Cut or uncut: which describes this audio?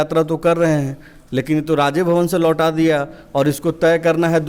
uncut